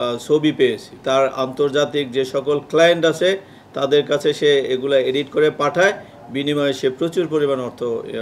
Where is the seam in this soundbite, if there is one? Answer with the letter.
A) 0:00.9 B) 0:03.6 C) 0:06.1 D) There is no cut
A